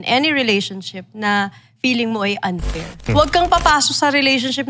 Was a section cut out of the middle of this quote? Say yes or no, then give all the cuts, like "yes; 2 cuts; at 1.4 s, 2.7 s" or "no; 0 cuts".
yes; 1 cut; at 3.1 s